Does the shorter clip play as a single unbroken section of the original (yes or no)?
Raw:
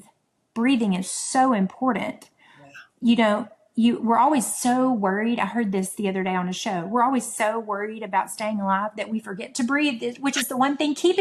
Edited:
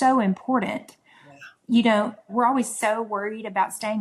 no